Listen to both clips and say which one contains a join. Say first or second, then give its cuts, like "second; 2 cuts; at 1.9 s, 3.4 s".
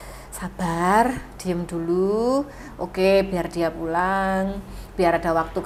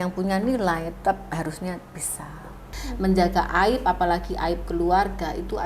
second; 1 cut; at 2.7 s